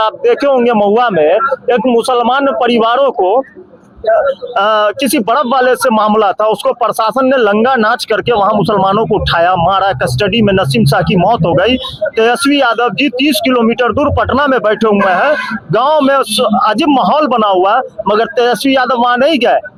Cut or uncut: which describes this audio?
uncut